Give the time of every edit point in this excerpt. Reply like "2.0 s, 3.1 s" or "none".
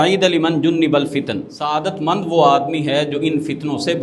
1.7 s